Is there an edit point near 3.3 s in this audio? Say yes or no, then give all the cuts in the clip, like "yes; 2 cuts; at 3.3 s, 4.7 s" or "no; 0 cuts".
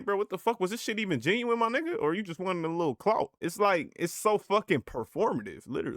yes; 1 cut; at 3.3 s